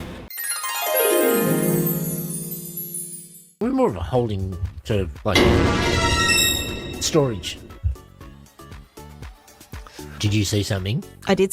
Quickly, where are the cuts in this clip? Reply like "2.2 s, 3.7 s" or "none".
10.2 s